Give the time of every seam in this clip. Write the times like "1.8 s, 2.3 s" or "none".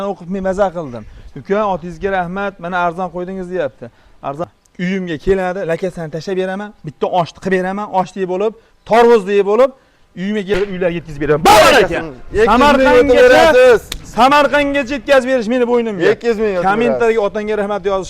4.4 s, 10.6 s